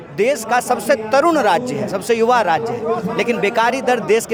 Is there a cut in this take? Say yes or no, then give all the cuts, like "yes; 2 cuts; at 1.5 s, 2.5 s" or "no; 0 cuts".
no; 0 cuts